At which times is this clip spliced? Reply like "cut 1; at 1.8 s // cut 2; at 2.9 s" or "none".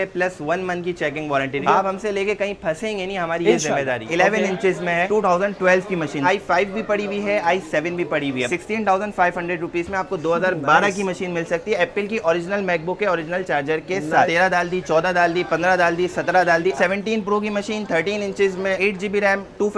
cut 1; at 1.6 s // cut 2; at 4.0 s // cut 3; at 6.2 s // cut 4; at 8.5 s // cut 5; at 14.3 s // cut 6; at 16.7 s // cut 7; at 18.8 s